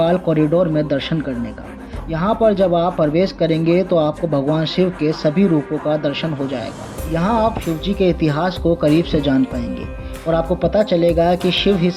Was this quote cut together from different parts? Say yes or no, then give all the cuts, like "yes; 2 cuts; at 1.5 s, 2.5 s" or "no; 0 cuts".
no; 0 cuts